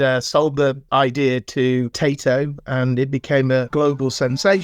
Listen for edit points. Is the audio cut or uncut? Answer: cut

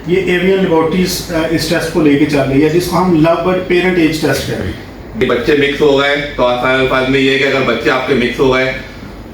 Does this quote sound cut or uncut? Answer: cut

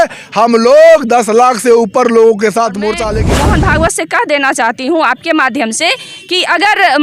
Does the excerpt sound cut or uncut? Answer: cut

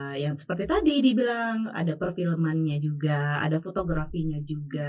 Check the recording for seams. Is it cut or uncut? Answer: uncut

